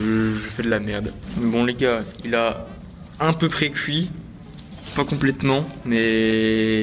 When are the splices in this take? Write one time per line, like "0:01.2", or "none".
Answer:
0:01.2